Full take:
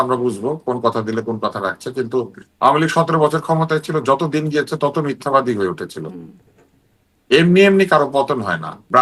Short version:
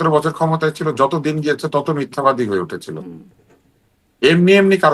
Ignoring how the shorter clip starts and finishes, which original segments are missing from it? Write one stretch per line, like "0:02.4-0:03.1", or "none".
none

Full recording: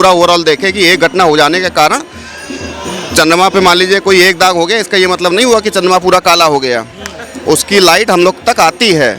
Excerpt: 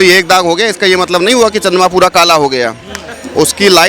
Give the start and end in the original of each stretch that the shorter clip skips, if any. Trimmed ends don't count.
none

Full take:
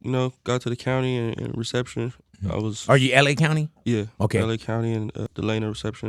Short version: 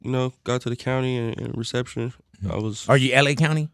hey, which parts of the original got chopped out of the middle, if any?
none

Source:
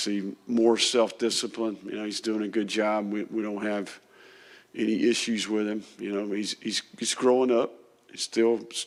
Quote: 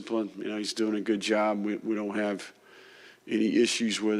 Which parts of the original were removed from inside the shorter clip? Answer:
none

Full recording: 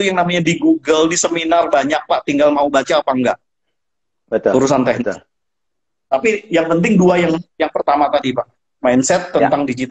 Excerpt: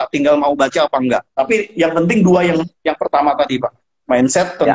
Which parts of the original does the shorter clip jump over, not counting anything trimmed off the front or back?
0:03.4-0:06.0

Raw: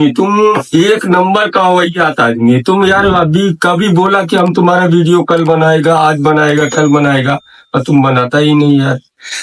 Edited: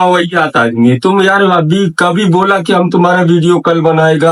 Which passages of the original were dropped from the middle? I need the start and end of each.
none

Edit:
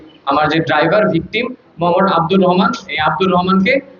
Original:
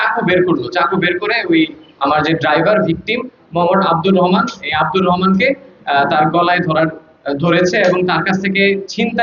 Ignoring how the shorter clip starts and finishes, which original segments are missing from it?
none

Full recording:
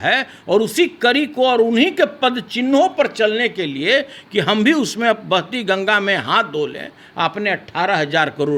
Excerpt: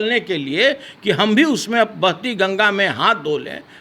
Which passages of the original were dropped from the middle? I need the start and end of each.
none

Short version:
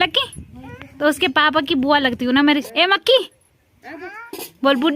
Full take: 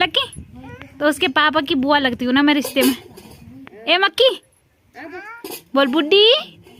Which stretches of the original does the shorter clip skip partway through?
0:02.7-0:03.8

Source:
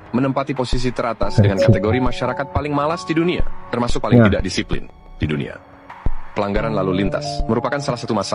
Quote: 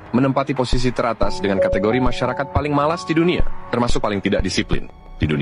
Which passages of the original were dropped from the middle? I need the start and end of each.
none

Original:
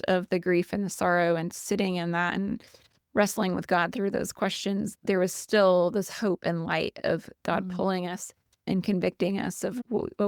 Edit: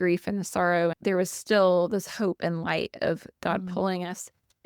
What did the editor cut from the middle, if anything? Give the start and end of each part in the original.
0:01.4-0:05.0

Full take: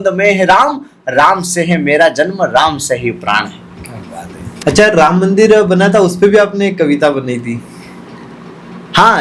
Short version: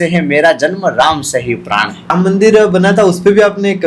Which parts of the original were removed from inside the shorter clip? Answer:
0:03.7-0:05.1

